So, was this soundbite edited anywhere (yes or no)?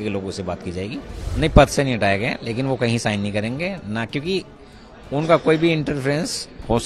yes